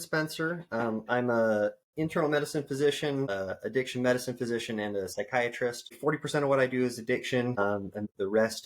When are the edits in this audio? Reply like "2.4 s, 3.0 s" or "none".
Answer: 3.3 s, 5.9 s, 7.9 s